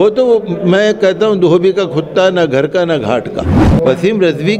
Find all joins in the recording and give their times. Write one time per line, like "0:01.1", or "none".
0:03.5